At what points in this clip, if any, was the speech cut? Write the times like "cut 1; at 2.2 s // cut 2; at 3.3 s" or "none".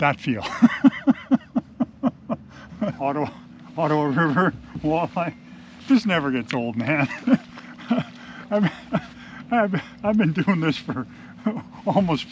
cut 1; at 3.0 s

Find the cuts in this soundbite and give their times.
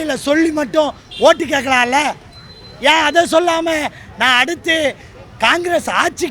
none

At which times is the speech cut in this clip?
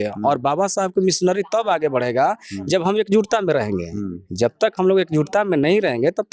none

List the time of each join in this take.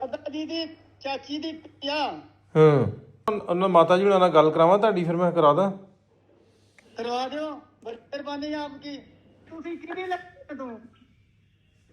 cut 1; at 3.4 s // cut 2; at 9.5 s

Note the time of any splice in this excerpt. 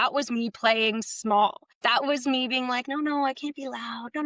cut 1; at 1.7 s

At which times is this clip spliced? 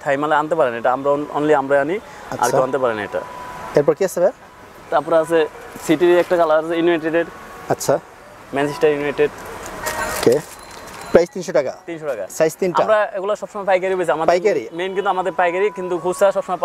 none

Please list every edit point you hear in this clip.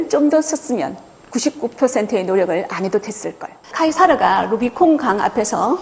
cut 1; at 3.6 s

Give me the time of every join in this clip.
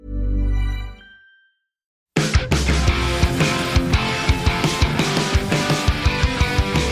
cut 1; at 2.1 s

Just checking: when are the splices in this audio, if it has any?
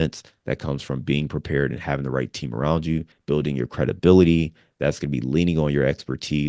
none

